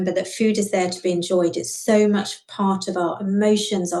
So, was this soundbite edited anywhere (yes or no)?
no